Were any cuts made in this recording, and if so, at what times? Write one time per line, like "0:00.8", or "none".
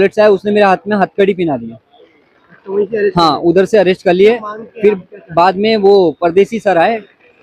none